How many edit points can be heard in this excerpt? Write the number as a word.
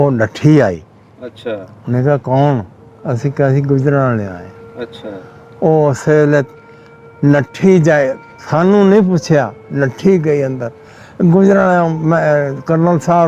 zero